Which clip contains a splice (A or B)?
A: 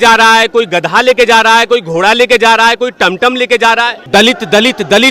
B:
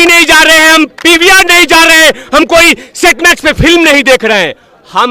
A